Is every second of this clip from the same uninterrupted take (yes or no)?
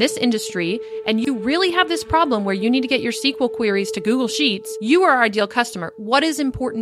no